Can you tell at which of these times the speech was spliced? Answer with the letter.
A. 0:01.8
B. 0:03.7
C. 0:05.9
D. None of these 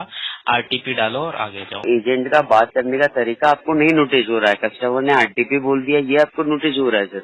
A